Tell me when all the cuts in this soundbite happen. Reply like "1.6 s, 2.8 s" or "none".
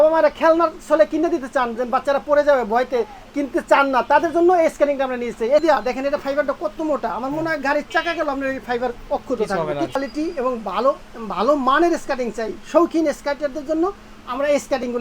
5.6 s, 10.0 s